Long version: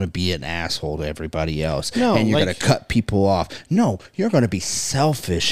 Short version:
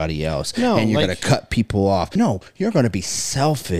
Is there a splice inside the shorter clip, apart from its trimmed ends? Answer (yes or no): yes